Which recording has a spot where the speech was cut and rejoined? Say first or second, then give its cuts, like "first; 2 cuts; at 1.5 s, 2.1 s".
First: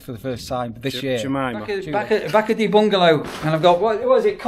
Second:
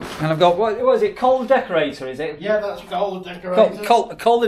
first; 1 cut; at 1.7 s